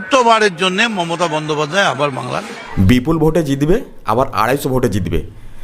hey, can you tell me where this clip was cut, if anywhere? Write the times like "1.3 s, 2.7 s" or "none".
2.6 s